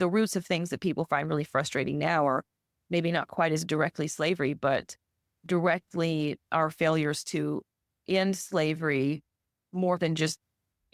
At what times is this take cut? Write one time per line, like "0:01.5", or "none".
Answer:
none

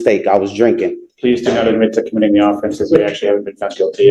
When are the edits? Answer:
0:01.0

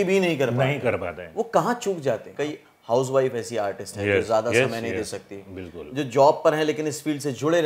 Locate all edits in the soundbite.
0:02.3

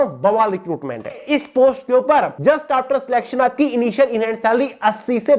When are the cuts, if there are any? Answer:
0:01.2
0:02.3

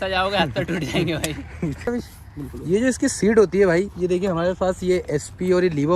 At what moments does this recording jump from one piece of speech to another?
0:01.9

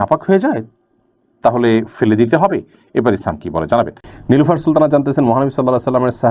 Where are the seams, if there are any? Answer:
0:04.1

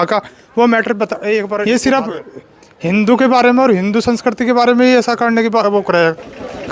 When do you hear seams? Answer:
0:01.5

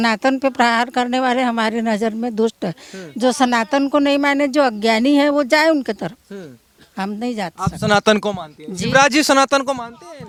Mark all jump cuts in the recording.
none

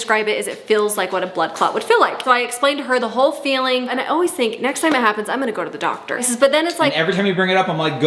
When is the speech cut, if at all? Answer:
none

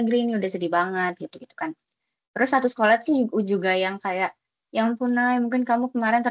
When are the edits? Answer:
none

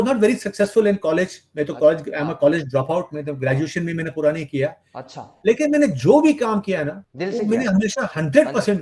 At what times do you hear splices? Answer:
none

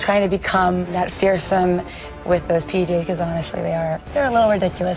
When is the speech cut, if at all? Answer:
0:00.9

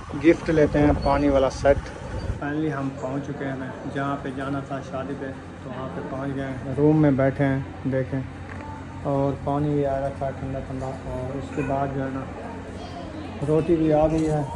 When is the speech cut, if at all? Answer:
0:02.4
0:05.7

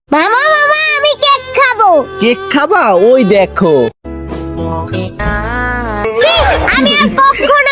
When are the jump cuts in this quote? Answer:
none

